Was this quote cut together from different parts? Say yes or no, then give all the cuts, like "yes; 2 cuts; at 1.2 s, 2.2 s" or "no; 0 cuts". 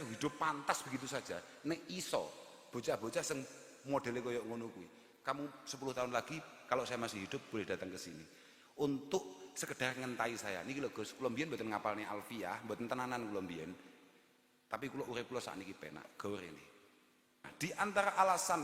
yes; 1 cut; at 17.5 s